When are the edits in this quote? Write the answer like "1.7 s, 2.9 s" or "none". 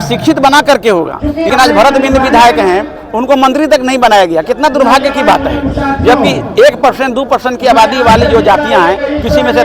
1.5 s